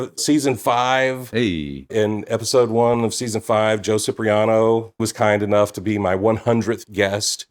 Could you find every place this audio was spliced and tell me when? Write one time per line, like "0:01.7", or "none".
0:05.0